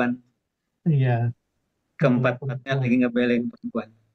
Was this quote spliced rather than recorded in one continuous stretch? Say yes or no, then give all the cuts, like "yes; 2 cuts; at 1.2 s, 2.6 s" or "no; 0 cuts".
no; 0 cuts